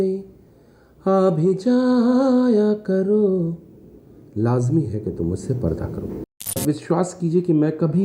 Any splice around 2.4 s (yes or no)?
no